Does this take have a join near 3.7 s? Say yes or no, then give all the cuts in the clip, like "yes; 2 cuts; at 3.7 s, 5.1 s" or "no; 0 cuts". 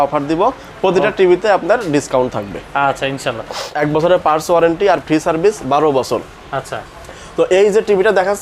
yes; 1 cut; at 3.7 s